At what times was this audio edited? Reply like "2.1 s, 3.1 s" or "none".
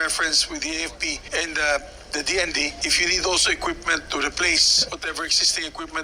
1.2 s, 2.8 s, 4.8 s

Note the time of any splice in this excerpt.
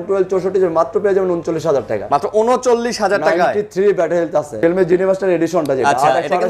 4.5 s

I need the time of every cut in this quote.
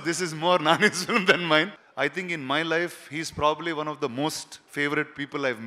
1.8 s

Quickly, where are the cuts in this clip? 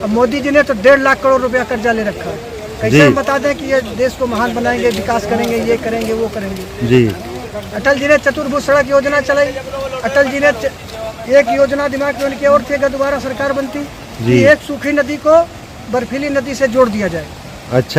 none

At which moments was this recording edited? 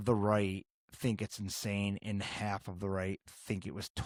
none

